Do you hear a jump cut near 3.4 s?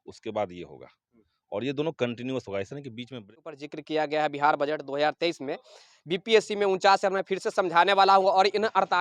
yes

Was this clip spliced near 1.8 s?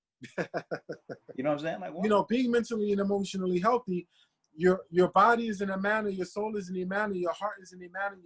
yes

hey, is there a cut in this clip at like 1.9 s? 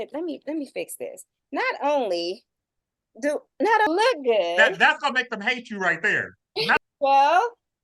no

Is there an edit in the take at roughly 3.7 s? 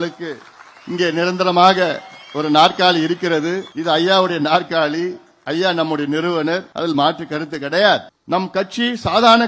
yes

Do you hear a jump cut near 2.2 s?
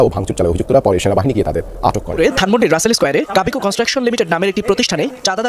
yes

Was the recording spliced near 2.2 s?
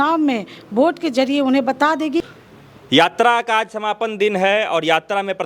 yes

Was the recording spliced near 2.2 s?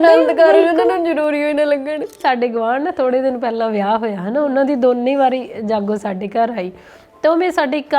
yes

